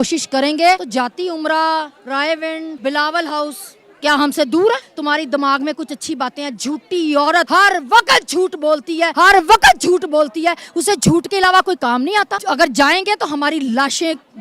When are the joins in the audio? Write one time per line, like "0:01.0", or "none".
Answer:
0:00.8
0:02.7
0:04.9
0:07.5
0:09.1
0:12.4